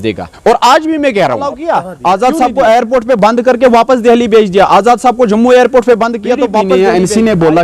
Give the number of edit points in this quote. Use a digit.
2